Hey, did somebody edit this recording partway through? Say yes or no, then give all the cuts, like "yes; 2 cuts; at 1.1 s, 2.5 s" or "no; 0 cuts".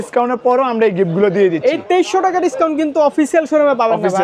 no; 0 cuts